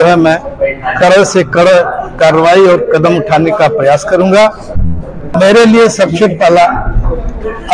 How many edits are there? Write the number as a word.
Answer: one